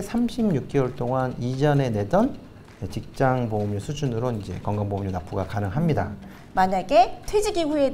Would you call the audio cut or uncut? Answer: cut